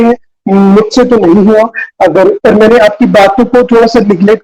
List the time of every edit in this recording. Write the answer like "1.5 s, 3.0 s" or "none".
2.4 s